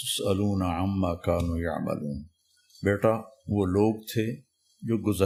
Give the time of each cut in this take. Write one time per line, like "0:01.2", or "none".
none